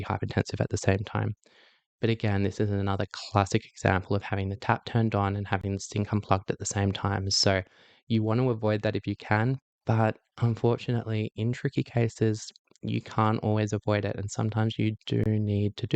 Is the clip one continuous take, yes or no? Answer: yes